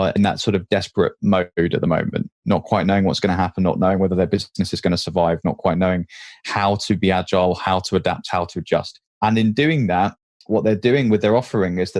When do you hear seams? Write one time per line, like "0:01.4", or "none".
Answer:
none